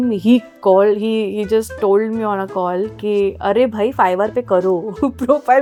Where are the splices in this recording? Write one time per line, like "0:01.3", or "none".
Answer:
none